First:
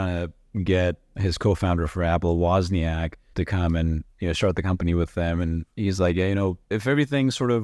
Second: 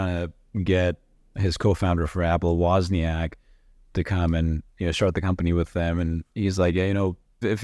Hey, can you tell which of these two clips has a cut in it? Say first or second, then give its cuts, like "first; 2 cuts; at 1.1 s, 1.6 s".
first; 3 cuts; at 1.1 s, 3.2 s, 6.7 s